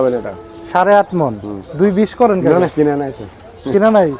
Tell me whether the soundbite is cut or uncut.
cut